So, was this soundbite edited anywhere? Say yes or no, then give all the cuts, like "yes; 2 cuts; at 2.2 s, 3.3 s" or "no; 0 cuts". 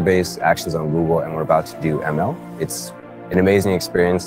yes; 1 cut; at 2.7 s